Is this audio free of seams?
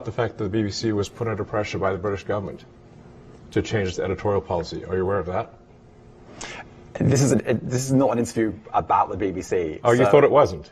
yes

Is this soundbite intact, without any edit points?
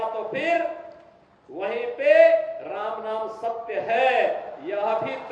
yes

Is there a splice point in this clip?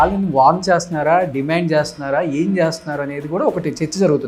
no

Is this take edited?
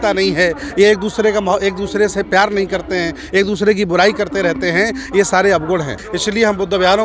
yes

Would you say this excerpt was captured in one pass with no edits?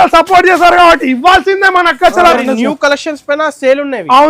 no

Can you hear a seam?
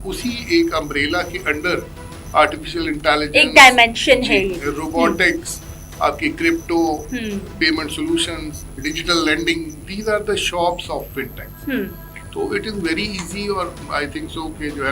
yes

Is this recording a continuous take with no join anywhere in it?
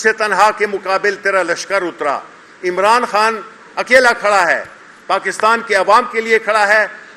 yes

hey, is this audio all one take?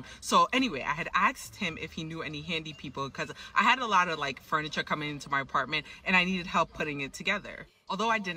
no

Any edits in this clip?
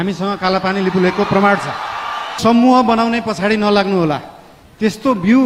yes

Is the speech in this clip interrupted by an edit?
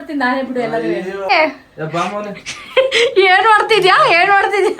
yes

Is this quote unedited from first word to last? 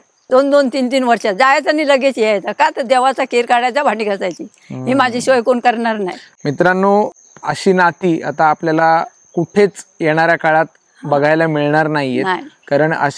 yes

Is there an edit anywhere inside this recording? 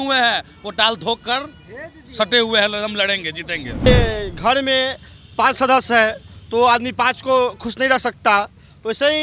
yes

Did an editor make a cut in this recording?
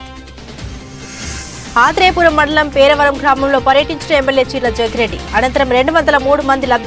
yes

